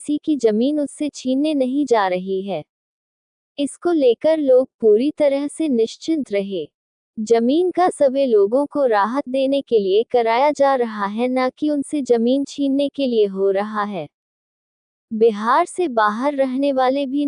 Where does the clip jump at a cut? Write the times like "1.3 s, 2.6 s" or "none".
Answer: 14.9 s